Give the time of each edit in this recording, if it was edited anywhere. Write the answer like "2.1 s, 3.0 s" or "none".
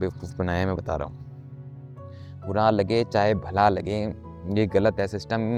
none